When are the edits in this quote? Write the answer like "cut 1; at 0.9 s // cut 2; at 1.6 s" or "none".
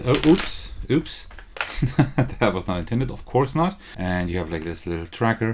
cut 1; at 3.9 s